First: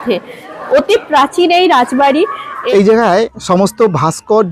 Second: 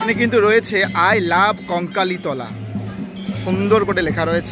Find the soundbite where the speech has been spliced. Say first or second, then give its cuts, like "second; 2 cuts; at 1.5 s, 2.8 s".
first; 1 cut; at 2.5 s